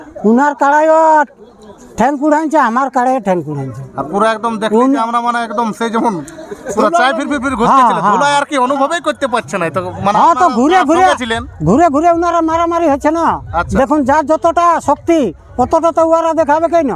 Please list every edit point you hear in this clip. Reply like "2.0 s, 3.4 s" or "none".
none